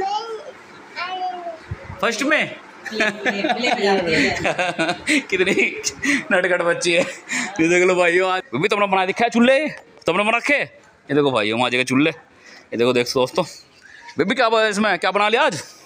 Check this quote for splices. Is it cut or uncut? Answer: cut